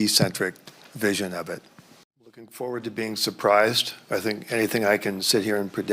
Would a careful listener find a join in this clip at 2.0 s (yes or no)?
yes